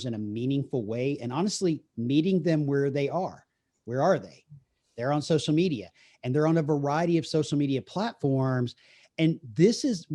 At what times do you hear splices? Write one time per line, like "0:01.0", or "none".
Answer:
none